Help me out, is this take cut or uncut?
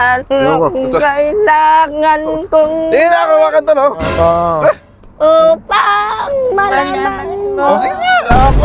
uncut